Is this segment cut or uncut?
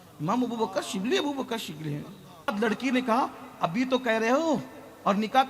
cut